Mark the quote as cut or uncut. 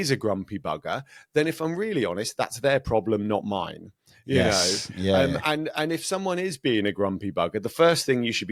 uncut